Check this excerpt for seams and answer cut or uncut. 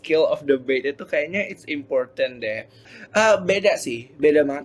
cut